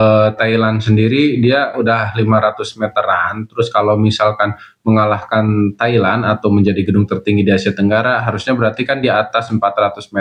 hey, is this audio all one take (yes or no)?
yes